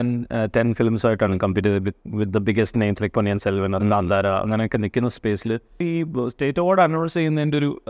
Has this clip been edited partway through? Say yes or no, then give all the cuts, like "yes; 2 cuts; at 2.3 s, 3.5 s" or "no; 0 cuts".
yes; 1 cut; at 5.8 s